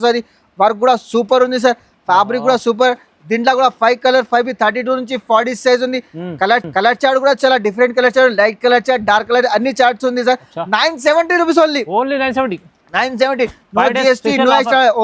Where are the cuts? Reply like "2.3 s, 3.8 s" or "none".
none